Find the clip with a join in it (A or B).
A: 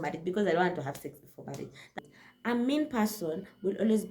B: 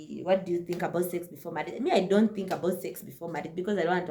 A